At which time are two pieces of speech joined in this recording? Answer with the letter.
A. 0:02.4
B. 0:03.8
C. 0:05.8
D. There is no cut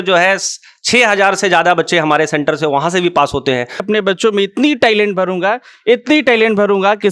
B